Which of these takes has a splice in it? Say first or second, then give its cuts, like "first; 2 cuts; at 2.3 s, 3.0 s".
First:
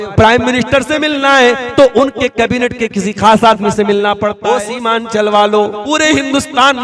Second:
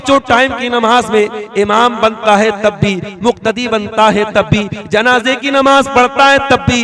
first; 2 cuts; at 4.4 s, 5.8 s